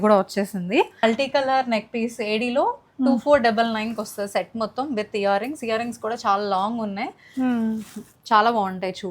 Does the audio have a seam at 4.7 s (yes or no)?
no